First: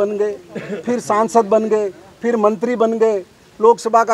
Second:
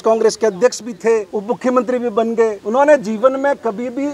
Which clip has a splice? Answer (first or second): second